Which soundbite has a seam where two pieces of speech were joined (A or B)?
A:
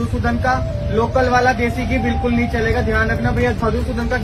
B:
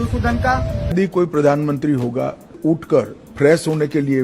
B